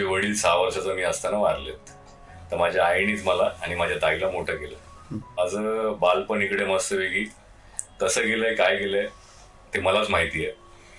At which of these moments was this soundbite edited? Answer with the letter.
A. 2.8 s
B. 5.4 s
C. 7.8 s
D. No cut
B